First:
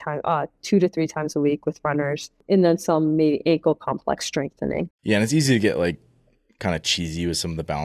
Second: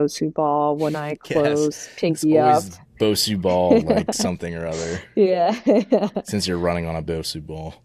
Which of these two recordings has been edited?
first; 2 cuts; at 2.3 s, 4.9 s

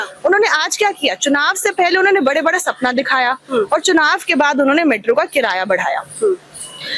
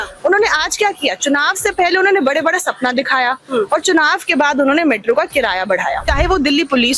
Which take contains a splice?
second; 1 cut; at 6.0 s

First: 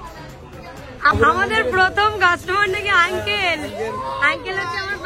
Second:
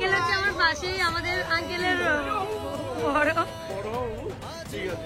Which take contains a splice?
first; 1 cut; at 1.1 s

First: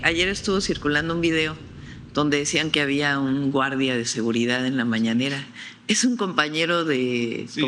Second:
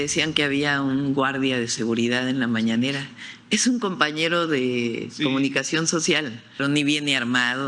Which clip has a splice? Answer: second; 1 cut; at 6.5 s

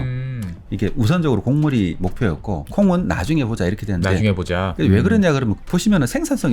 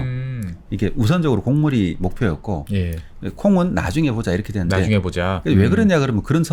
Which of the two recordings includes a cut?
first; 2 cuts; at 2.6 s, 5.6 s

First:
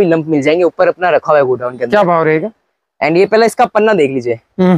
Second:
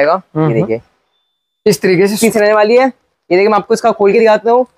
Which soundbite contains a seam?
second; 1 cut; at 2.2 s

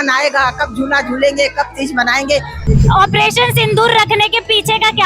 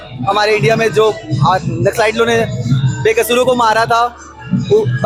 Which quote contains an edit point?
first; 1 cut; at 2.7 s

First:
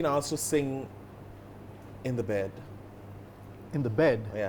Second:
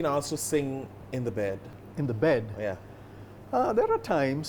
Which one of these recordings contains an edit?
second; 2 cuts; at 1.0 s, 1.8 s

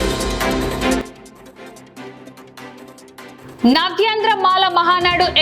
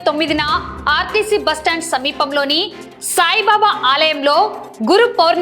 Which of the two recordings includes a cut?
first; 2 cuts; at 1.0 s, 3.3 s

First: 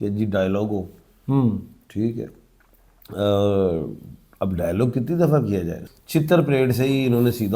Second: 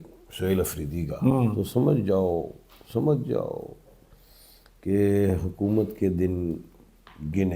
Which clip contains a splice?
first; 1 cut; at 5.8 s

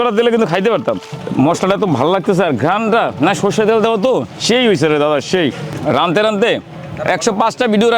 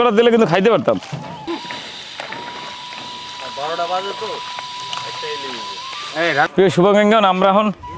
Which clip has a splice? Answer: first; 3 cuts; at 1.1 s, 4.3 s, 5.7 s

